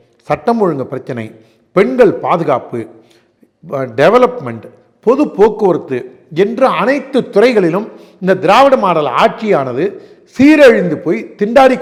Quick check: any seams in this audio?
no; 0 cuts

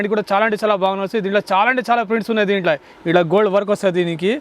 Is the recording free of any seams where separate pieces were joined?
no; 1 cut; at 2.9 s

